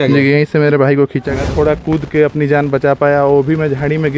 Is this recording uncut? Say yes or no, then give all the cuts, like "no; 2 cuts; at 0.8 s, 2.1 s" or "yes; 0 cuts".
no; 1 cut; at 1.2 s